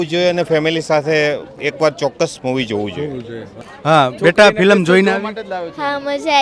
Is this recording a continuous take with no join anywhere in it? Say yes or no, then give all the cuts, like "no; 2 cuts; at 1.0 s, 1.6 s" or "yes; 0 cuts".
no; 1 cut; at 3.7 s